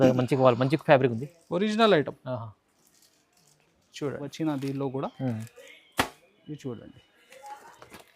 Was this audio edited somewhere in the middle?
yes; 1 cut; at 4.3 s

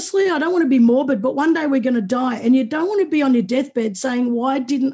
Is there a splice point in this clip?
no; 0 cuts

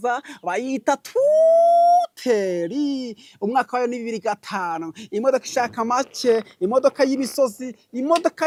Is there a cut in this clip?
no; 0 cuts

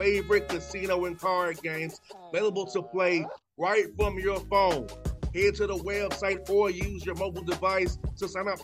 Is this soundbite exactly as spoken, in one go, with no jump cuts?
yes; 0 cuts

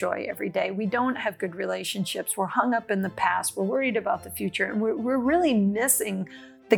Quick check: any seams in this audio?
no; 0 cuts

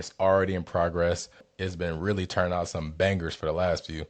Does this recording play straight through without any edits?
no; 1 cut; at 1.4 s

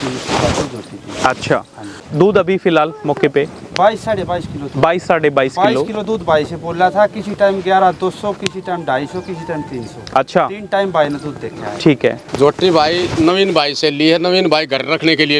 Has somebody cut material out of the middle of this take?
yes; 2 cuts; at 2.1 s, 12.2 s

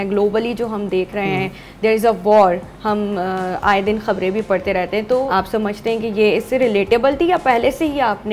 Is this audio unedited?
yes; 0 cuts

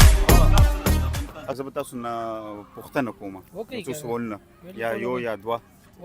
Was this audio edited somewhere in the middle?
yes; 1 cut; at 1.6 s

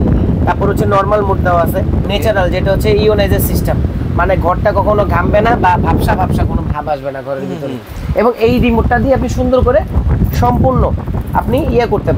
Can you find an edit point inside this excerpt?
no; 0 cuts

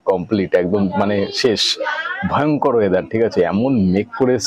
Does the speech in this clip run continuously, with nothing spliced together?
yes; 0 cuts

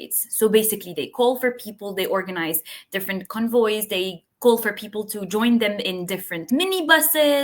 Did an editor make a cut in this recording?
yes; 1 cut; at 6.4 s

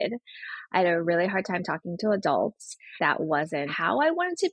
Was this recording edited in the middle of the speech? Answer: yes; 2 cuts; at 3.0 s, 3.7 s

